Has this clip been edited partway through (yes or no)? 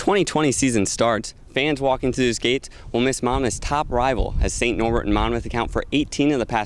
no